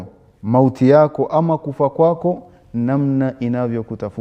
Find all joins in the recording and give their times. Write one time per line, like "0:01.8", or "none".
none